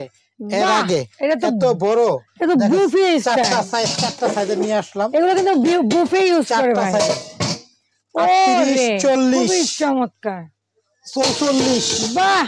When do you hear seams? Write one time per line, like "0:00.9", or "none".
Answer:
none